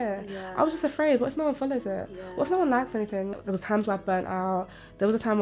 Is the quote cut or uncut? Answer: cut